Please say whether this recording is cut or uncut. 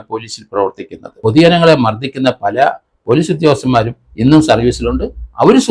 cut